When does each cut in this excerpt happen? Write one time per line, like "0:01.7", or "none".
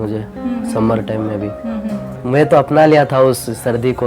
0:02.2